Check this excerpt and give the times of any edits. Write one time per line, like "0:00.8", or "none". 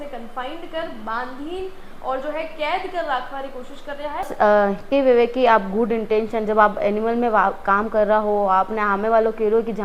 0:04.3